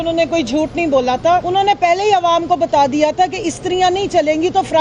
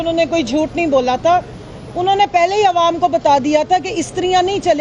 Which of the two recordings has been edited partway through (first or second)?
first